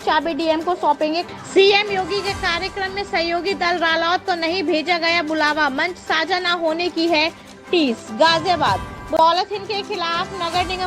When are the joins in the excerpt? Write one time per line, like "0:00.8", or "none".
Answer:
0:01.2
0:09.2